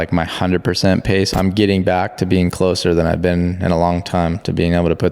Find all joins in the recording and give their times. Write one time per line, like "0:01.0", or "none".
0:01.3

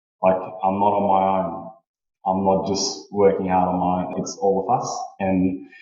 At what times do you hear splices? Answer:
0:04.1

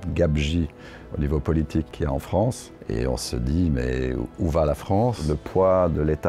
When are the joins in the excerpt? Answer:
0:01.9
0:02.7
0:05.3

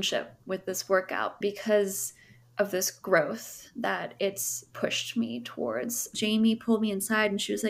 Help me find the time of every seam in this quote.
0:01.4
0:06.1

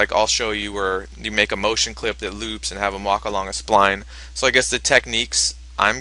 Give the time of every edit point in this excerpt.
0:04.8

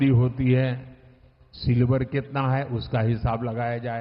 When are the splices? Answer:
none

